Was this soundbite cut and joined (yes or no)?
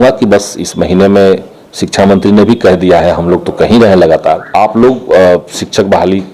yes